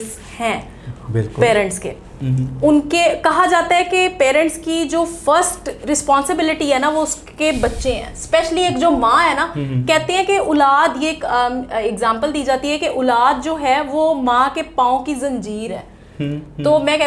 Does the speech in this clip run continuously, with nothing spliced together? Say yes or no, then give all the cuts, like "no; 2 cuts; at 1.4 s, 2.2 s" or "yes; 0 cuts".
yes; 0 cuts